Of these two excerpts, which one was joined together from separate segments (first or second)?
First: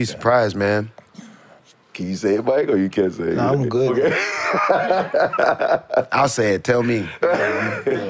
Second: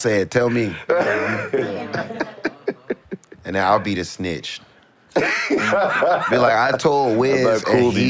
first